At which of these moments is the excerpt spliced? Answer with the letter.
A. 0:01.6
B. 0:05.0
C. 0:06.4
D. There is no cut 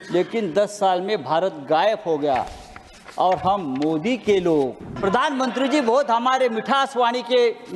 B